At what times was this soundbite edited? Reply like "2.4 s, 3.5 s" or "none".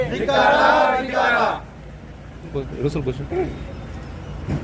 2.5 s